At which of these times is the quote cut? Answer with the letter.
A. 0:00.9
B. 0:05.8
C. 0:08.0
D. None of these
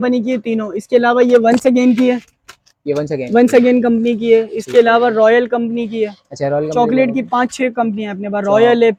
D